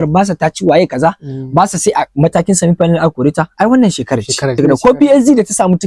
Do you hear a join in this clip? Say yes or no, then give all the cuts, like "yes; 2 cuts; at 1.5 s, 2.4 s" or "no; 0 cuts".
no; 0 cuts